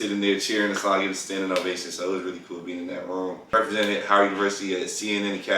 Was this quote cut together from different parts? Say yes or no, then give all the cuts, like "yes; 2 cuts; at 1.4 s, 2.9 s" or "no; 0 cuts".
yes; 1 cut; at 3.4 s